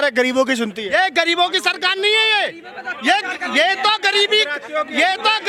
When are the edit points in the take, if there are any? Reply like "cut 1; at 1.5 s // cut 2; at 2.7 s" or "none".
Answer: none